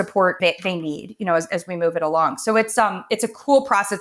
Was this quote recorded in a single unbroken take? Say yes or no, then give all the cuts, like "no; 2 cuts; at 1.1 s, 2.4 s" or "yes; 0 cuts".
yes; 0 cuts